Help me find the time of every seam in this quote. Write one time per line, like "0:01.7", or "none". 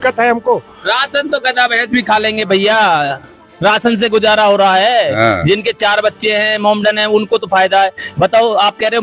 none